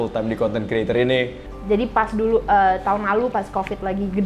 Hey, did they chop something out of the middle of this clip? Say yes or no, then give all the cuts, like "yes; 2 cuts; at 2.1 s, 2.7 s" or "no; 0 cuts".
yes; 1 cut; at 1.5 s